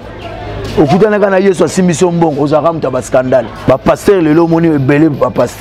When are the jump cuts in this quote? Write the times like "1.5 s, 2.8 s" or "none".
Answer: 3.7 s